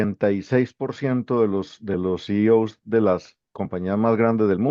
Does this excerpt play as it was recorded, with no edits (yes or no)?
yes